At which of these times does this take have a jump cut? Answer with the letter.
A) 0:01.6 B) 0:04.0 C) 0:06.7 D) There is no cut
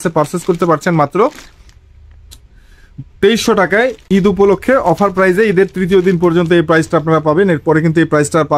D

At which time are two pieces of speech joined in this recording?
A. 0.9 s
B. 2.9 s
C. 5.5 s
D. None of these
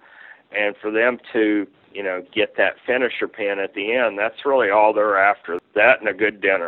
C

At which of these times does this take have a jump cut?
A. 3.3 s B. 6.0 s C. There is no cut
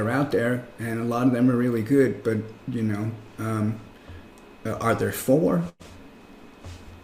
C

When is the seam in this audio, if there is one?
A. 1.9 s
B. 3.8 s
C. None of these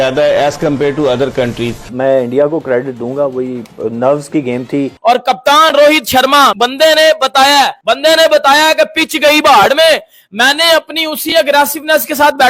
A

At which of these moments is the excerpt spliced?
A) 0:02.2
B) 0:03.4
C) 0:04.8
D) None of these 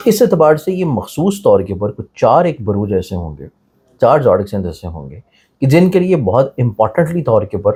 D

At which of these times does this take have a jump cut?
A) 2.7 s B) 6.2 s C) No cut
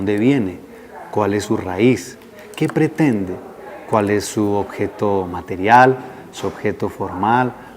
A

